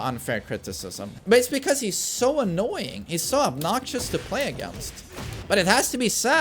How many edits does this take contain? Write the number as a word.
one